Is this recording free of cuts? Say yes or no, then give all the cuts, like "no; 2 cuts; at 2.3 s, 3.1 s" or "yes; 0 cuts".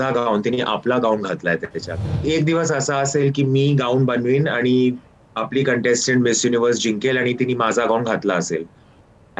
no; 1 cut; at 2.3 s